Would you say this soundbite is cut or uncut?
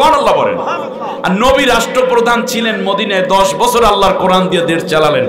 uncut